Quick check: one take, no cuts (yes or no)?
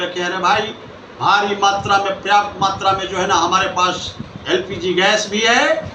yes